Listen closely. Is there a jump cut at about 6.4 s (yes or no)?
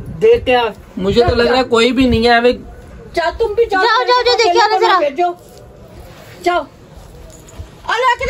no